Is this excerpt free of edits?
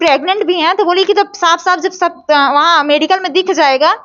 yes; 0 cuts

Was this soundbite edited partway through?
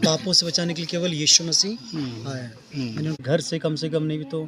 yes; 1 cut; at 3.2 s

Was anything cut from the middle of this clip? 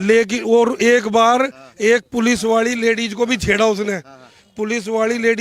no; 0 cuts

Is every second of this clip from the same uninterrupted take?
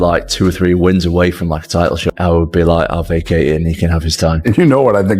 no; 1 cut; at 2.1 s

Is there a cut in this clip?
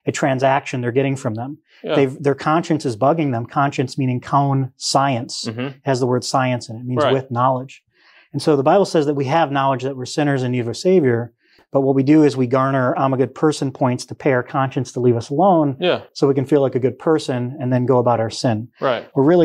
no; 0 cuts

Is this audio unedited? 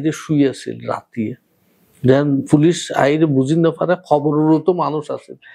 yes; 0 cuts

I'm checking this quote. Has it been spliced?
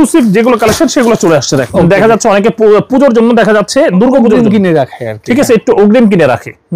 yes; 1 cut; at 1.7 s

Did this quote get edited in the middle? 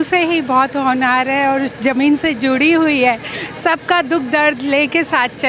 no; 0 cuts

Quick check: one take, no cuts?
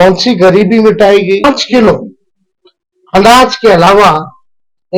no; 1 cut; at 1.4 s

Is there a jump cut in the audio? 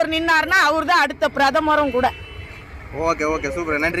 no; 0 cuts

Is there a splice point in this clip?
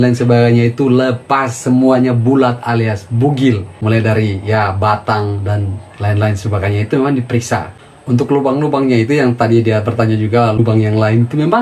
yes; 3 cuts; at 3.7 s, 7.8 s, 10.6 s

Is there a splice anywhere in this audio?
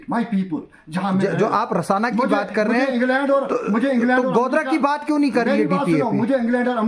no; 0 cuts

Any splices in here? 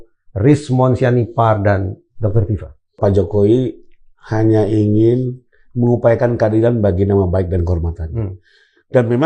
yes; 1 cut; at 3.0 s

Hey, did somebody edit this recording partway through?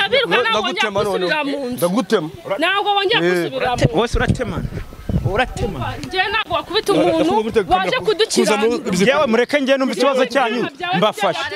no; 0 cuts

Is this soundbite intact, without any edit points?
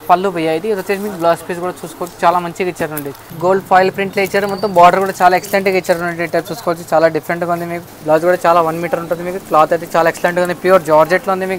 no; 2 cuts; at 3.3 s, 7.8 s

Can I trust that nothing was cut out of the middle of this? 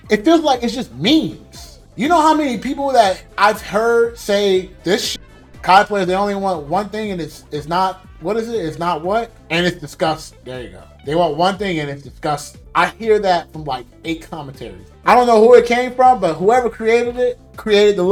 yes; 0 cuts

